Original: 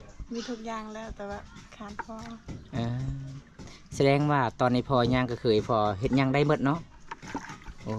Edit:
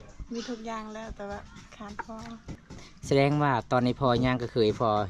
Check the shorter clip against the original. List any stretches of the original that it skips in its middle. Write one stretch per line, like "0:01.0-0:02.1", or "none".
0:02.6-0:03.5